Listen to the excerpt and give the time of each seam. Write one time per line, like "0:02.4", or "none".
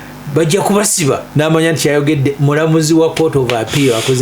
0:01.3